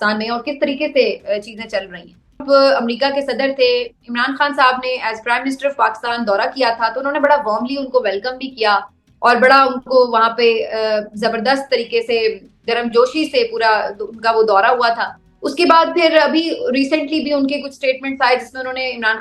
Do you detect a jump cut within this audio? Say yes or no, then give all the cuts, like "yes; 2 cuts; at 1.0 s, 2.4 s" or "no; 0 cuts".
yes; 1 cut; at 2.4 s